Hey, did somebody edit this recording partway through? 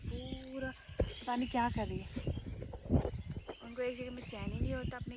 no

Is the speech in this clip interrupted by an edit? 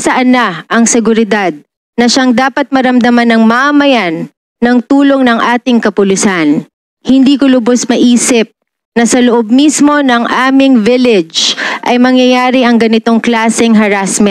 no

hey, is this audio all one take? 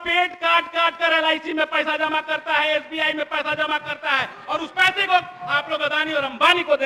yes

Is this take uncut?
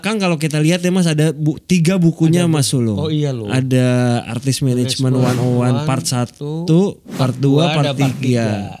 yes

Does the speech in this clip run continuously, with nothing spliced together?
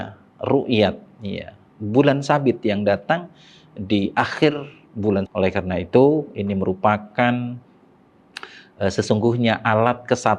no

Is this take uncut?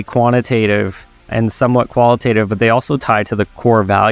yes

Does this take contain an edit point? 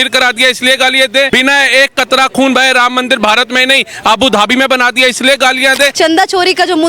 yes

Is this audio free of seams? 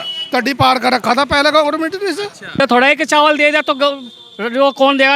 no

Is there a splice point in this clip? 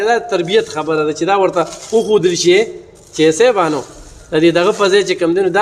no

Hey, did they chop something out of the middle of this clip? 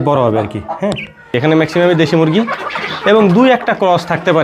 yes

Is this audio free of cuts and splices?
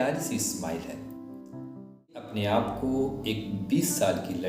no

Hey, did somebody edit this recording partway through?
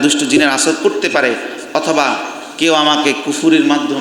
no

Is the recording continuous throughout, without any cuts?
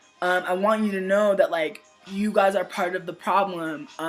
no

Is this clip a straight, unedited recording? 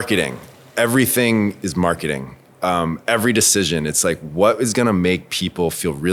yes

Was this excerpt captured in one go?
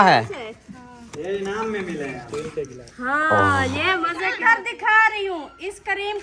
no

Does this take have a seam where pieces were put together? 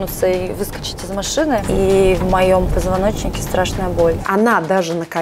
yes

